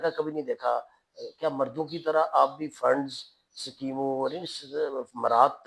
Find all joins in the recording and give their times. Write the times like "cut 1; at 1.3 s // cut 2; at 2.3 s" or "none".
none